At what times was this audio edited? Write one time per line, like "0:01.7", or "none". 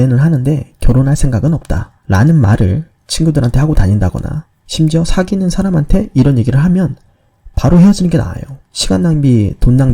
0:08.6